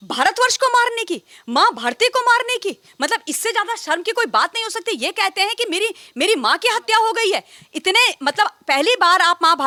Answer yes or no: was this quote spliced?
no